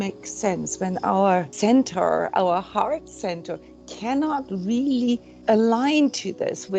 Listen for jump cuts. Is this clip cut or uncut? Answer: cut